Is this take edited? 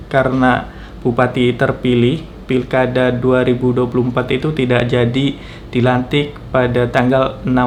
no; 0 cuts

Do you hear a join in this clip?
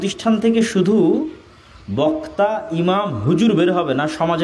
no; 0 cuts

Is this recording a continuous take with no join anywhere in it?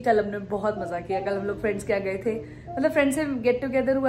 yes; 0 cuts

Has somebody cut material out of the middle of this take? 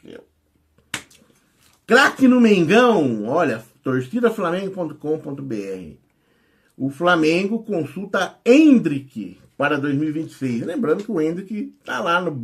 no; 0 cuts

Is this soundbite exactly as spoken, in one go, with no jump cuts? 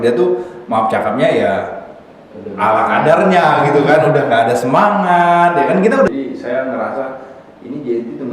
no; 1 cut; at 6.1 s

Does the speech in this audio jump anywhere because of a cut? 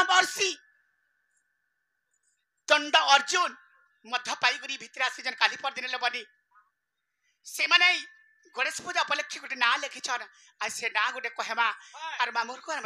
no; 0 cuts

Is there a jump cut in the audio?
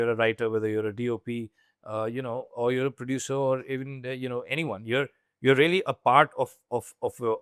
no; 0 cuts

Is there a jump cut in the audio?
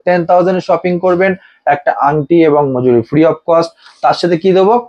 no; 0 cuts

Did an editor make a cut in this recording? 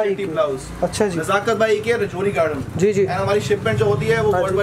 no; 0 cuts

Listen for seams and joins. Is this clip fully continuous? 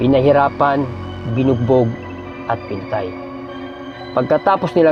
yes; 0 cuts

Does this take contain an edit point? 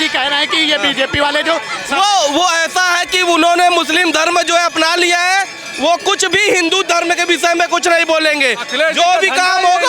no; 0 cuts

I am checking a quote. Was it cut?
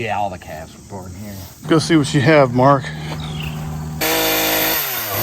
yes; 1 cut; at 3.9 s

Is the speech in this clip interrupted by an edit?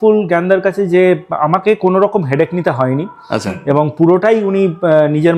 no; 0 cuts

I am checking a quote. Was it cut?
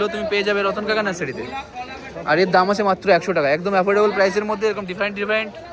no; 0 cuts

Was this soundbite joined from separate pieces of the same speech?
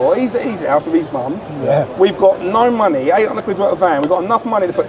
no; 0 cuts

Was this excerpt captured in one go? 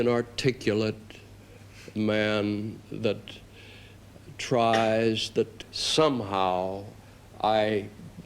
no; 1 cut; at 5.6 s

